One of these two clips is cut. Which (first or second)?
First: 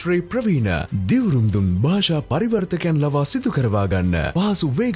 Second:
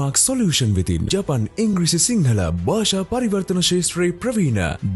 second